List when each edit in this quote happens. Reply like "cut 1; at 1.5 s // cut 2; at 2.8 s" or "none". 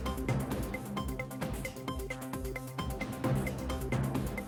none

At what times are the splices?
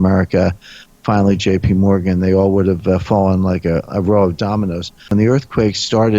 cut 1; at 5.1 s

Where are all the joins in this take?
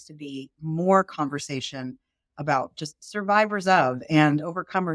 none

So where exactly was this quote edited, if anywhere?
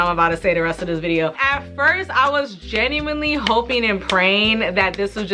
none

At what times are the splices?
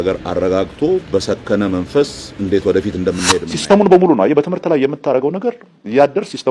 cut 1; at 3.5 s

